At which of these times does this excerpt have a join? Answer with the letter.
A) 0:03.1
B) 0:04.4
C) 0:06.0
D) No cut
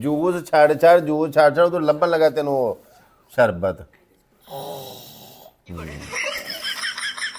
C